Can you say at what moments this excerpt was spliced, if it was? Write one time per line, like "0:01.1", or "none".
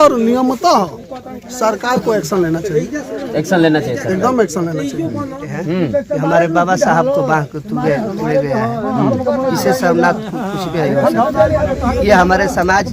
0:05.6